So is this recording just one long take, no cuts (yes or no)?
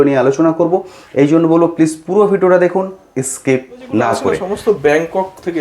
no